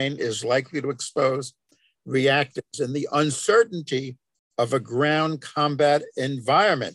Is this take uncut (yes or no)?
yes